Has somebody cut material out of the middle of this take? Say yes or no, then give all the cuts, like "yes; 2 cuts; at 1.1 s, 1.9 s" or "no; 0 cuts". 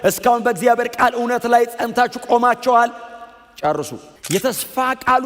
yes; 1 cut; at 4.1 s